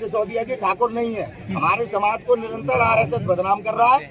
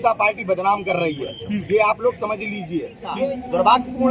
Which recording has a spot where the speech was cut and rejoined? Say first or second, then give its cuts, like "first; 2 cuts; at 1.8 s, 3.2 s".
second; 1 cut; at 3.2 s